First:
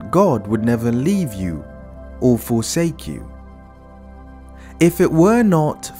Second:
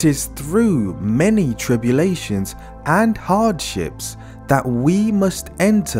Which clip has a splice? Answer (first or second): first